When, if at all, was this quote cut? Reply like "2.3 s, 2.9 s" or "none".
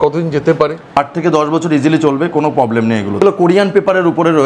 0.9 s, 3.2 s